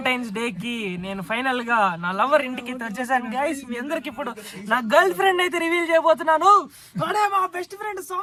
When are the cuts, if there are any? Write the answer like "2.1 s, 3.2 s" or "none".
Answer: none